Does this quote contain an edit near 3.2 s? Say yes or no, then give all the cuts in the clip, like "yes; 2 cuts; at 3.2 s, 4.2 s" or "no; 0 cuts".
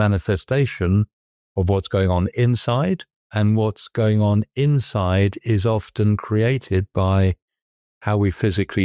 yes; 1 cut; at 3.2 s